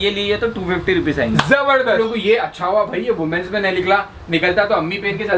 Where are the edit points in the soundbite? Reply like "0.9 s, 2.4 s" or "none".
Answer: 2.0 s

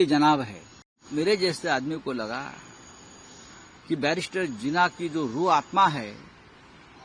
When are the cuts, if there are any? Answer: 1.0 s

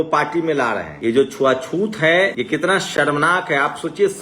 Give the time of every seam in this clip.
0.9 s, 2.3 s

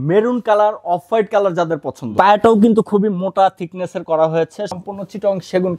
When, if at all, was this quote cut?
2.0 s, 4.8 s

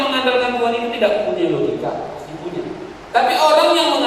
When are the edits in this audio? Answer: 2.9 s

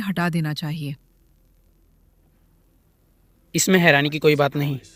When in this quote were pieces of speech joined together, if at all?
none

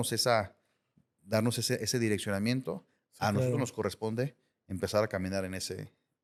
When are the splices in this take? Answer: none

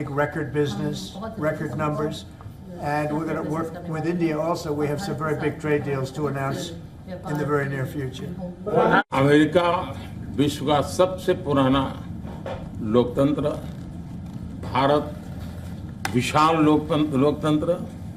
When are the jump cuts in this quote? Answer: 9.1 s

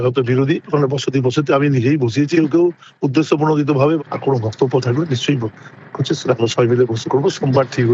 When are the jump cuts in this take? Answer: none

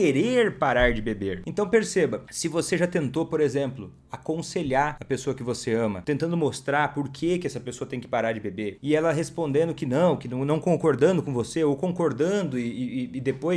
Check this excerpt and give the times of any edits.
1.4 s, 2.3 s, 5.0 s, 6.0 s, 8.8 s

